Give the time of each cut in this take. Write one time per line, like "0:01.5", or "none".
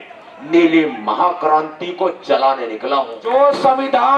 0:03.2